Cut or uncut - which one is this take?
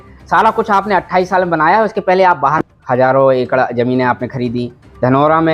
cut